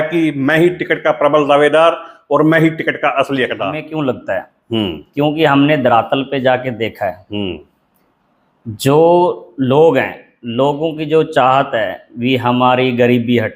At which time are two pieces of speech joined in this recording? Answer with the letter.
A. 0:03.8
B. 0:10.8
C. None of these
A